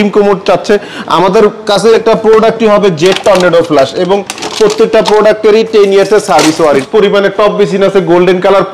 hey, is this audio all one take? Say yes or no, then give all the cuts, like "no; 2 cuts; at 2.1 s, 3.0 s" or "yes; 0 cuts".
no; 2 cuts; at 1.9 s, 6.9 s